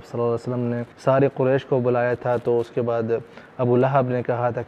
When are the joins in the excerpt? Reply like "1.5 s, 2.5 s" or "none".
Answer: 0.9 s